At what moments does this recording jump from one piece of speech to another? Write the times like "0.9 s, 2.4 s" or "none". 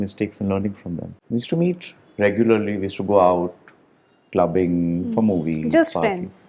1.1 s